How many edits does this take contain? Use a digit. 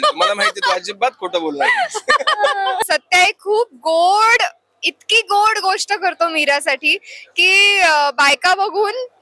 1